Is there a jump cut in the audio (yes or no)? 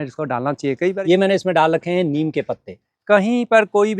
yes